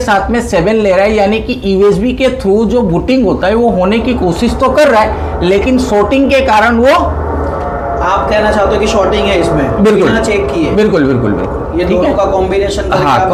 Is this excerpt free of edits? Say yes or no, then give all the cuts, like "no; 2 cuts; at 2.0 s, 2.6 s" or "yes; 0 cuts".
yes; 0 cuts